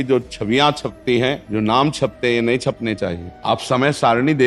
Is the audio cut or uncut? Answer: cut